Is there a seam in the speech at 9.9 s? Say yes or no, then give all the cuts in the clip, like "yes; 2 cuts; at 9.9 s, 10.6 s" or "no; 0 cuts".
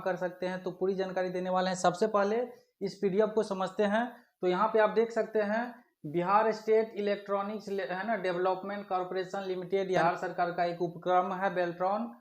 yes; 1 cut; at 9.9 s